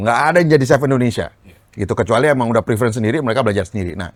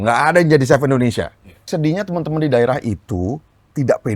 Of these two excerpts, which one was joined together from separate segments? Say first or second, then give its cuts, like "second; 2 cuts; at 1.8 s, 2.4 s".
second; 1 cut; at 1.7 s